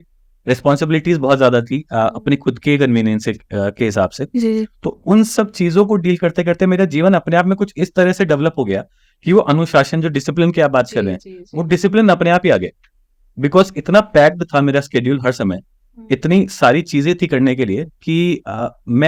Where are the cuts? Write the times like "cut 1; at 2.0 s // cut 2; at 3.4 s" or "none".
none